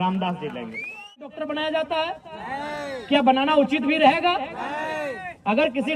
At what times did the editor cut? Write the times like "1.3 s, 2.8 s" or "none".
1.2 s